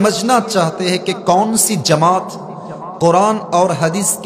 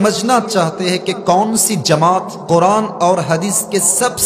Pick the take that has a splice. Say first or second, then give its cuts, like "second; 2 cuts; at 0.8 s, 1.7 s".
second; 1 cut; at 2.3 s